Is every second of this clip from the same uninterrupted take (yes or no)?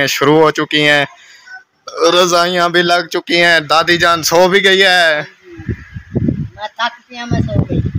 yes